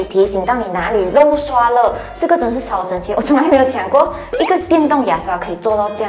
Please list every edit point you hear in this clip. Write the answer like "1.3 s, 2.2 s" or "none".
none